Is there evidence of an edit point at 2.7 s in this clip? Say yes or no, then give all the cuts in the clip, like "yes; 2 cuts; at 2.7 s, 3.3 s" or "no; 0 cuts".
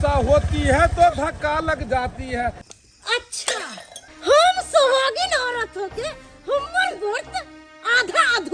yes; 1 cut; at 2.7 s